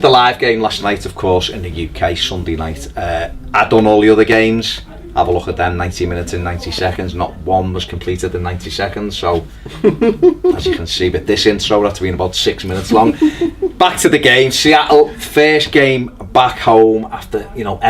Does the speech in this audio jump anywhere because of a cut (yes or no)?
yes